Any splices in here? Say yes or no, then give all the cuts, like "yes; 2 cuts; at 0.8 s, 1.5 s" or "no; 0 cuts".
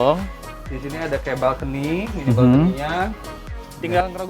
yes; 1 cut; at 3.2 s